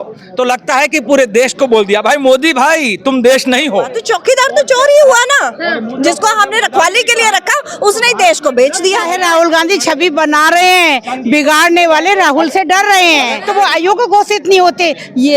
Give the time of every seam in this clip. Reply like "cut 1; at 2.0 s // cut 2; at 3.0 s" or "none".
cut 1; at 4.0 s // cut 2; at 9.1 s // cut 3; at 13.4 s